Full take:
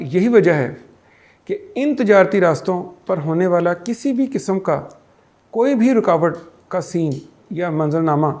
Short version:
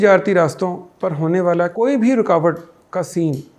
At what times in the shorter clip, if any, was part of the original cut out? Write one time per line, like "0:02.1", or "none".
0:01.7